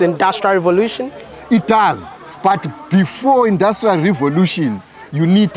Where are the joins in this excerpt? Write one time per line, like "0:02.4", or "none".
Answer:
0:01.3